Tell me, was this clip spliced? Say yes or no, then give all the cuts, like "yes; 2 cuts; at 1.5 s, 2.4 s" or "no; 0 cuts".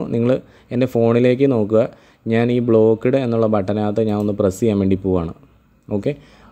no; 0 cuts